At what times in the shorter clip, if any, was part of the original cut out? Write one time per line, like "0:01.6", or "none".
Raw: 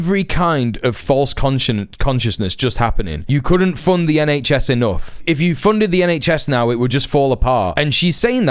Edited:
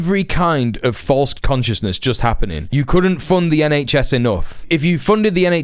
0:01.3